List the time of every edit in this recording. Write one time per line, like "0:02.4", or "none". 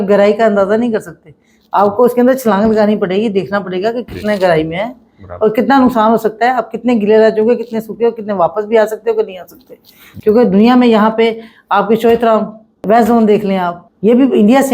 0:12.8
0:13.8